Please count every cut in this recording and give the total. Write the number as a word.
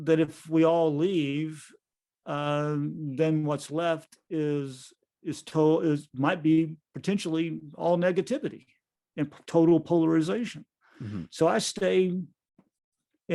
zero